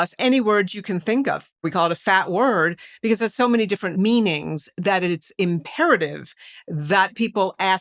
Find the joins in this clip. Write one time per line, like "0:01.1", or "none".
0:01.6